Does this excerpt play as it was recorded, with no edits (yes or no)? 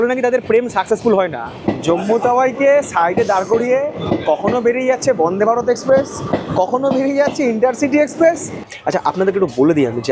no